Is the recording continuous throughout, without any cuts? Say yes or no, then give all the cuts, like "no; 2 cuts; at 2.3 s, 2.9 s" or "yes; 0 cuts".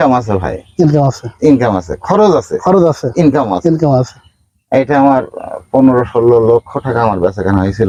yes; 0 cuts